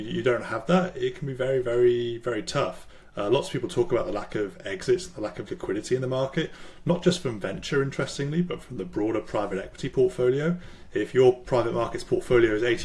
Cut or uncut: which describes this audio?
uncut